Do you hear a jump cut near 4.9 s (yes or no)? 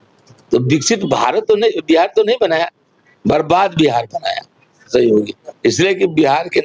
yes